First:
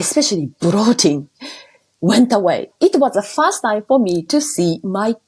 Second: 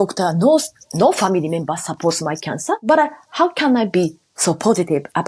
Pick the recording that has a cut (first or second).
second